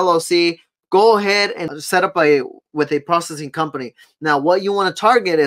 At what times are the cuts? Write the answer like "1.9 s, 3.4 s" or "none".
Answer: 1.7 s